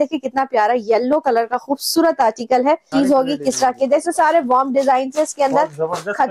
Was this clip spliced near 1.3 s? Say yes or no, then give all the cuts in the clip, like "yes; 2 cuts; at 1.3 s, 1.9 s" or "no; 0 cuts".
no; 1 cut; at 2.9 s